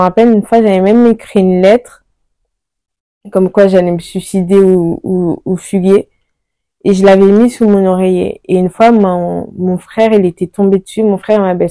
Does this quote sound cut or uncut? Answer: uncut